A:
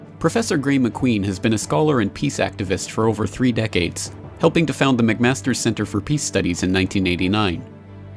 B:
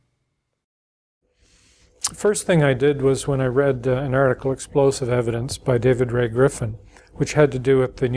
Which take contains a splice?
B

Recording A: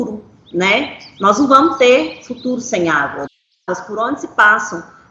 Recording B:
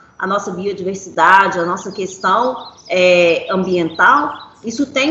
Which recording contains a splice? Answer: A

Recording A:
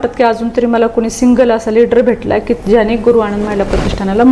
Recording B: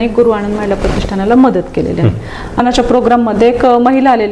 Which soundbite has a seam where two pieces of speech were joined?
B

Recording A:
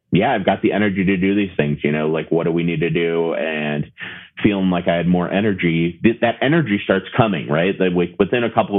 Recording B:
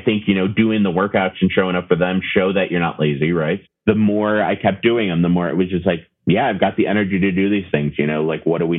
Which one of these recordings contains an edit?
B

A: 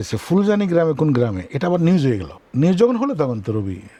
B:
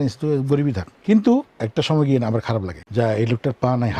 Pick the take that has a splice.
B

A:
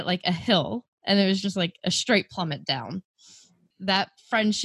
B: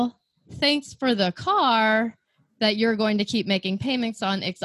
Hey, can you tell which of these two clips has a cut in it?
A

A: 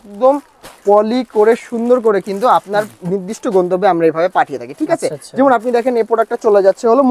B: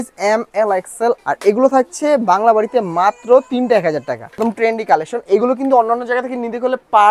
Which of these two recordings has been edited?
B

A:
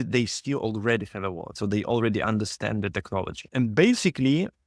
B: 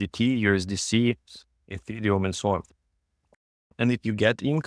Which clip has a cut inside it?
A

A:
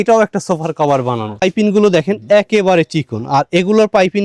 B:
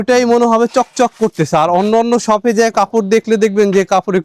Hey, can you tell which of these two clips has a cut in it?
A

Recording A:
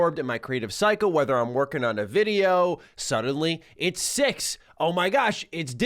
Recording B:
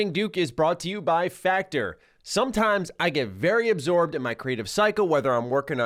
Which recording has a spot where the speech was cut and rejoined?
A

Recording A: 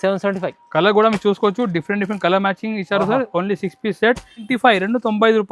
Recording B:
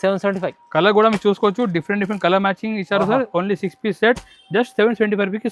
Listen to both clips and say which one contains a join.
A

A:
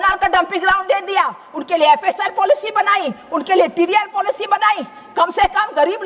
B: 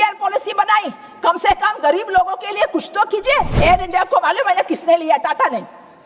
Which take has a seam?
B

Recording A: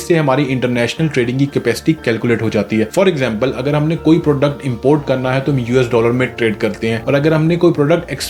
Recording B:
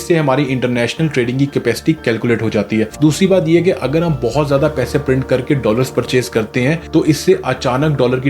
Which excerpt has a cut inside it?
B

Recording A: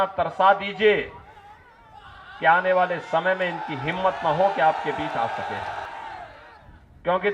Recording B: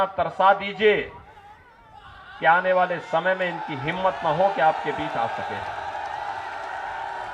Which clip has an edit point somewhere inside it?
A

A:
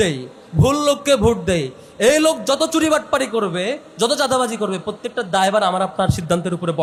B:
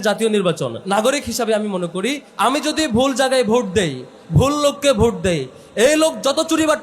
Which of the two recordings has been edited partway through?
B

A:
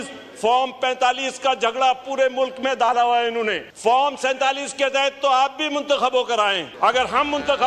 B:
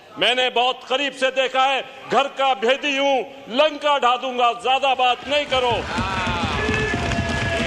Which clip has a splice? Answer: A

